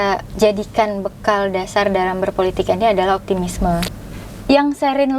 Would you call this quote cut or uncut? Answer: cut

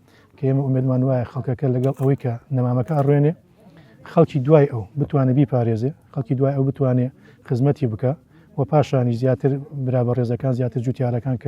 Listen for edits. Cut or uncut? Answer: uncut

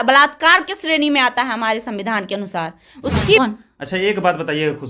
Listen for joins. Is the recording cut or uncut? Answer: cut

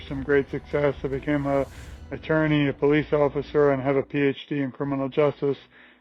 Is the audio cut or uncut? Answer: uncut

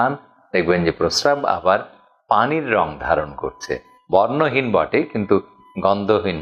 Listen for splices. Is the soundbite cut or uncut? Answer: cut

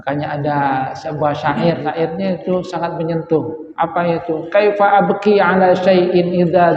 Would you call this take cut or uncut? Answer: cut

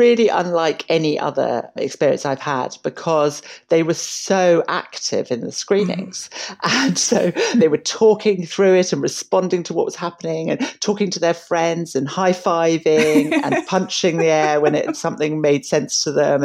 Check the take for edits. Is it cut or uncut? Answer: uncut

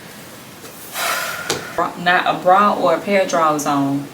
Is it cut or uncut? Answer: cut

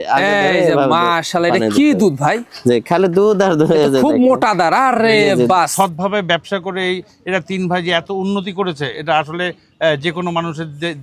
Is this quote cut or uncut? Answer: cut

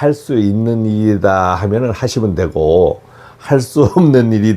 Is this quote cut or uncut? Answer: uncut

